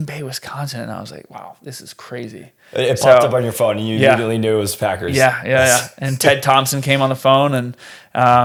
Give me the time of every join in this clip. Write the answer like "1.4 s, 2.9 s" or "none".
none